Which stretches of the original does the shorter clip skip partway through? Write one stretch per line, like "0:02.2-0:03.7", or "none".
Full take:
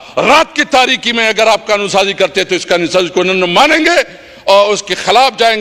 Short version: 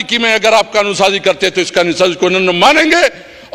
none